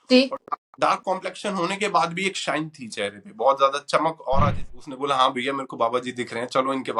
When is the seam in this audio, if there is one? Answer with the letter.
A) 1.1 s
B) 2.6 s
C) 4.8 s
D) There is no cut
C